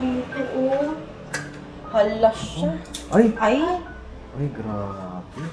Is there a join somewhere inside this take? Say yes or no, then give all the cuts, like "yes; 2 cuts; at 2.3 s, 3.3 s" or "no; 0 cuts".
no; 0 cuts